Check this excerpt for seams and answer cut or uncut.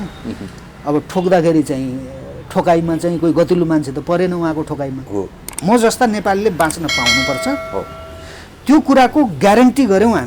cut